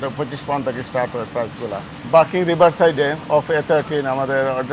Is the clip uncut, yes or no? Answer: no